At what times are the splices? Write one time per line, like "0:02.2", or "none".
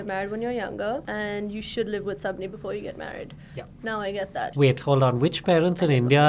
0:01.1
0:04.5